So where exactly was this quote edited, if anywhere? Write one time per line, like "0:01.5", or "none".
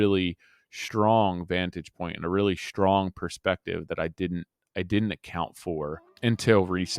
0:06.1

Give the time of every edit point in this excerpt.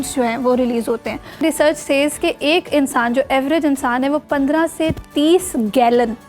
0:01.4

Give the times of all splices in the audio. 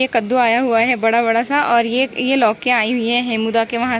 none

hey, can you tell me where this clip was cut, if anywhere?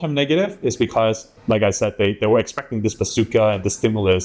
0:01.3

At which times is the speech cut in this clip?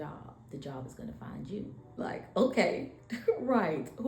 0:02.0

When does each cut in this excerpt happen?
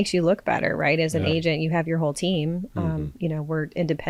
none

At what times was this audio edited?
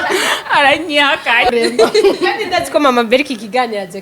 0:01.5

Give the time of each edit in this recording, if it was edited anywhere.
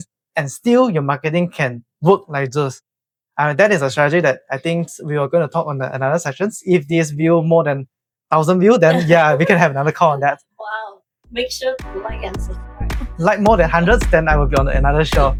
none

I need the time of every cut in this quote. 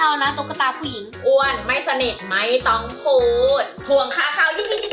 0:03.8

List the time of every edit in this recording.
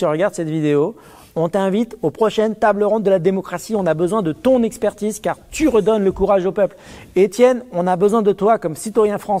none

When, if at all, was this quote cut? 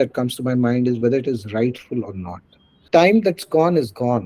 0:02.8

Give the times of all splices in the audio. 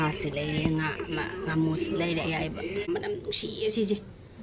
0:02.9

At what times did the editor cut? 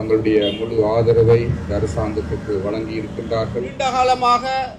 0:03.9

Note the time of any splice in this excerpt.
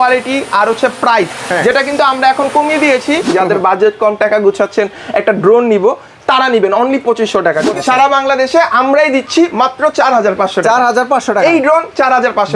0:03.3
0:07.7

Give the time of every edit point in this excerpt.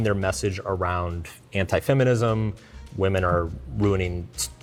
none

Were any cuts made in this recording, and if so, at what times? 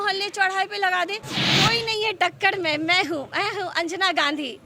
0:01.3

